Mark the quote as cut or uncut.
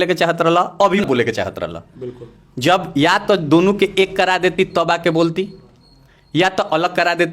cut